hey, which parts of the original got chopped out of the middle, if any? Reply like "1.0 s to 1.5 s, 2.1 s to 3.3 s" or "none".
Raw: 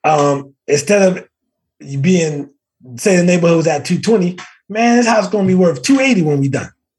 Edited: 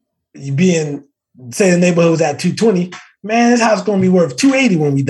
none